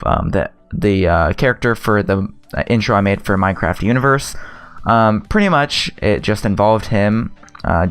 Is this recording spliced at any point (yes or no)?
no